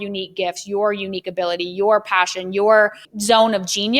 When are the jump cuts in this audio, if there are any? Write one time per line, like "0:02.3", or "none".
0:03.1